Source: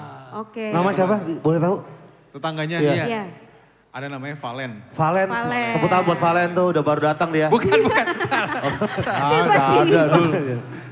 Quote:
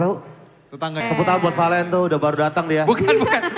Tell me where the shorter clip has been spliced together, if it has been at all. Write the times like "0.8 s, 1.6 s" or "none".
1.0 s